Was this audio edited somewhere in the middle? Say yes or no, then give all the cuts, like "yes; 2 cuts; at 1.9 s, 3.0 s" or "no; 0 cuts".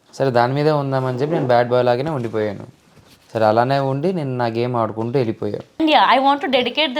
yes; 1 cut; at 5.8 s